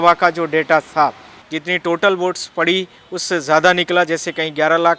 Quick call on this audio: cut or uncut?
cut